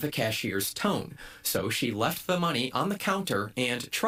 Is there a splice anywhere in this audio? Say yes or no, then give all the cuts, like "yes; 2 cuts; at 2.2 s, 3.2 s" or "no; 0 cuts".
no; 0 cuts